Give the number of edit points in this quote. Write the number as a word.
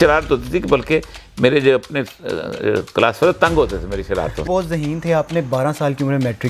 one